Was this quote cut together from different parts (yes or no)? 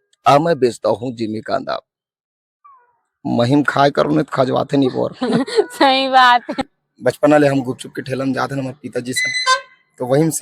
yes